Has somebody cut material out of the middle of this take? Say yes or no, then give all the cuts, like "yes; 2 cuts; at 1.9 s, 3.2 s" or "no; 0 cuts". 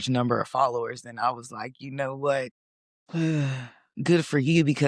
no; 0 cuts